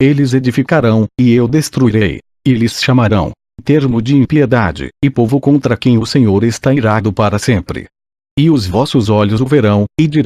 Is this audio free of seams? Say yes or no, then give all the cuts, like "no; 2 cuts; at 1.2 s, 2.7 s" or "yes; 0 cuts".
yes; 0 cuts